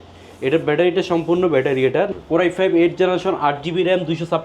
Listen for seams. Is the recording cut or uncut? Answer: cut